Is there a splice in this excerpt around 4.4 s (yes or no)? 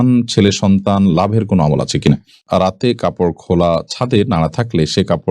no